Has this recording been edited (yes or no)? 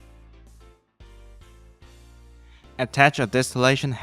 no